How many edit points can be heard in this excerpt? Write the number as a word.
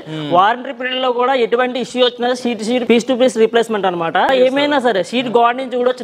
two